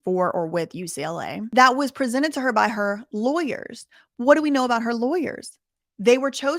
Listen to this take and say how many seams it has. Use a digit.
1